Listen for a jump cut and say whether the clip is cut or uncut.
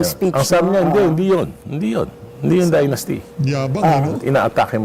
uncut